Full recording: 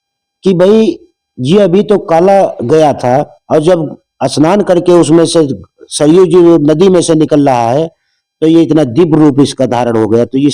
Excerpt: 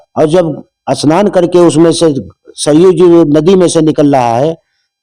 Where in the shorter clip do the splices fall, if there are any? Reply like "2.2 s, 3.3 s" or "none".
none